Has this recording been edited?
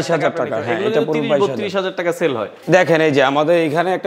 yes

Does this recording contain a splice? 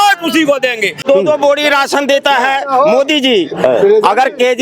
yes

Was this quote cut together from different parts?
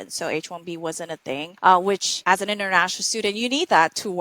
yes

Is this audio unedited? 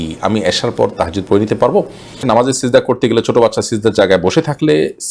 no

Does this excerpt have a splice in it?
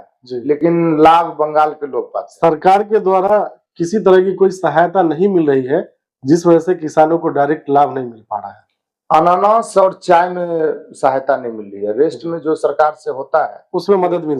no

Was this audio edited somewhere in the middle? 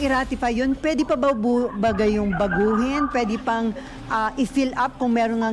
no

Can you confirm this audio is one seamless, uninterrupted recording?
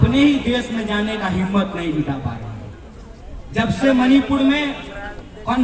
yes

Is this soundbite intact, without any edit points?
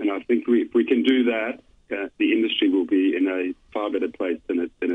yes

